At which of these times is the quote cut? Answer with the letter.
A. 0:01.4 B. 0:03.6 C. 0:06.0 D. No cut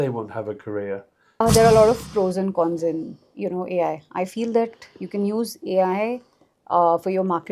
A